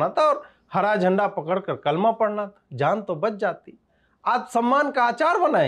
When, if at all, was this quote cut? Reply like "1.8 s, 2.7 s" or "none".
none

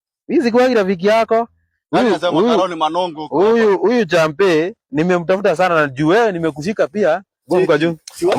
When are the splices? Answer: none

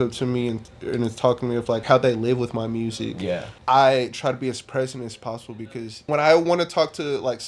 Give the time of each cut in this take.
1.8 s, 3.5 s, 6.1 s

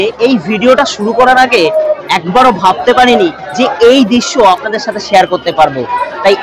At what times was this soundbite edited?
none

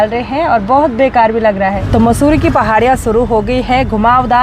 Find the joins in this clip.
1.8 s

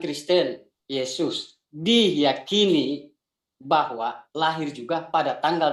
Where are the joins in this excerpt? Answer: none

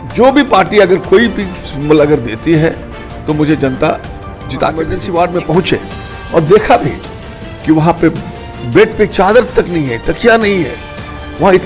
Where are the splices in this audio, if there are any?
5.0 s

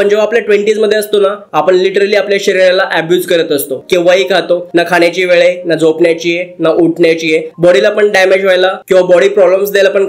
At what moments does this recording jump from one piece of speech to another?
3.8 s, 7.5 s

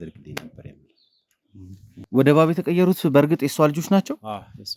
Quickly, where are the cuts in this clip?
2.0 s

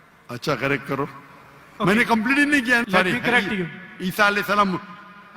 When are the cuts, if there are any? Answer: 2.8 s

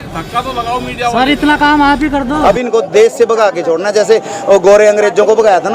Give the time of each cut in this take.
2.4 s

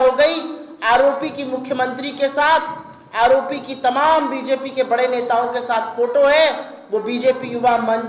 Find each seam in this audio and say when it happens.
none

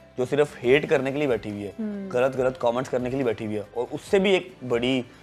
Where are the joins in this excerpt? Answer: none

